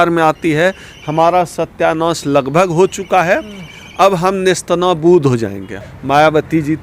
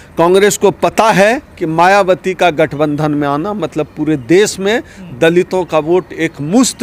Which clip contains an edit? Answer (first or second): first